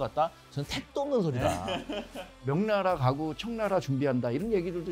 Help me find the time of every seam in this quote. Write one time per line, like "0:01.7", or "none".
0:02.5